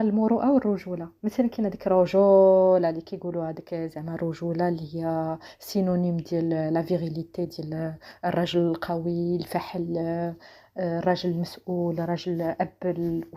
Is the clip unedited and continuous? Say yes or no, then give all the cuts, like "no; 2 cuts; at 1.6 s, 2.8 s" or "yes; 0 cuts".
yes; 0 cuts